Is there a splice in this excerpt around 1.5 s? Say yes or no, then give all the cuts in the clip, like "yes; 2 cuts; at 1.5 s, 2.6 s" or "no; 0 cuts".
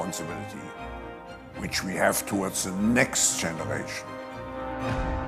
no; 0 cuts